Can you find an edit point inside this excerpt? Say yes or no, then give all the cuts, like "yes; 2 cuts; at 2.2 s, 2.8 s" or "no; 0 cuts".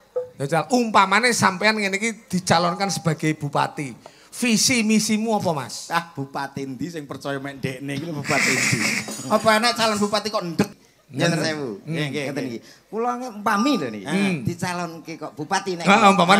yes; 1 cut; at 10.7 s